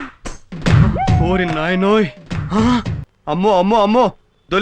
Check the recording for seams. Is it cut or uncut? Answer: cut